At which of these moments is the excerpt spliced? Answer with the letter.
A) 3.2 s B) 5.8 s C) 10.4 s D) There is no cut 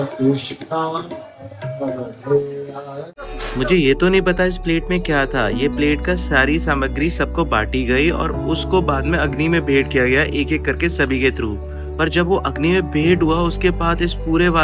A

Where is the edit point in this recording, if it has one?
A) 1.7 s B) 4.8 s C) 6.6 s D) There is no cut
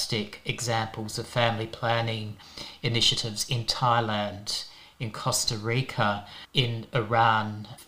D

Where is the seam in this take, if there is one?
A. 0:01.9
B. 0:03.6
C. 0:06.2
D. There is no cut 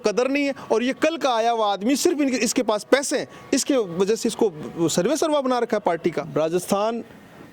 C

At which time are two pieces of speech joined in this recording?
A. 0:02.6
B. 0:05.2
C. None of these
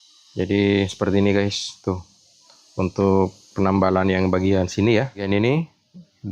B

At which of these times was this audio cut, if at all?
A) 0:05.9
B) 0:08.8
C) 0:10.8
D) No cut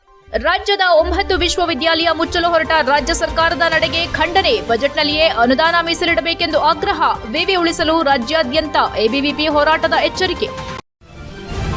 C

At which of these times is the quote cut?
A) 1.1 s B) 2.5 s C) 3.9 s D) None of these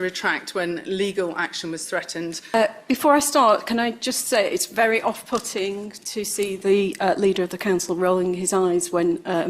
B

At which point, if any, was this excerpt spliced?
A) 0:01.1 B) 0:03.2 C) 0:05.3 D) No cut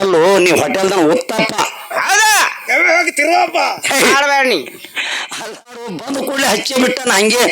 C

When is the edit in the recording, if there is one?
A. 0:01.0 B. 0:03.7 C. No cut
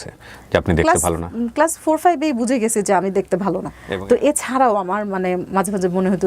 B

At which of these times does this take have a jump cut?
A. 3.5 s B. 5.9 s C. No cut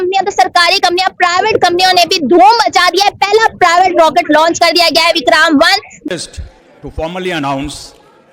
B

